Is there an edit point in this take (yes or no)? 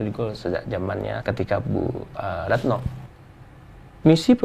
yes